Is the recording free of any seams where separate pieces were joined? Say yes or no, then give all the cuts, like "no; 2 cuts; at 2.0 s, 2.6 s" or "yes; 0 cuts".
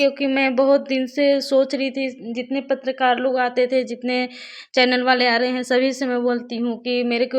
yes; 0 cuts